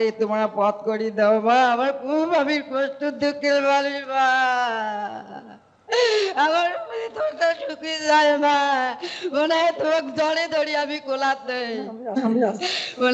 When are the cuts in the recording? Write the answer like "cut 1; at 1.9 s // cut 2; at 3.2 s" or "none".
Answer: none